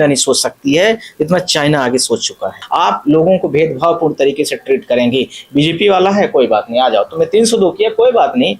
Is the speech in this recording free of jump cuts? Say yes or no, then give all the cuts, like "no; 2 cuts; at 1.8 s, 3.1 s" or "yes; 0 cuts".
no; 1 cut; at 2.6 s